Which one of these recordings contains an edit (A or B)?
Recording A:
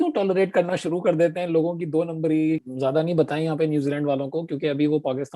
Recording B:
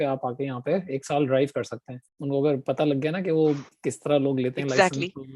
A